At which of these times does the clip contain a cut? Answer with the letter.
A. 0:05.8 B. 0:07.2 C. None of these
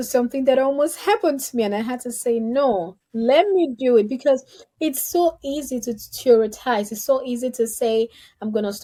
C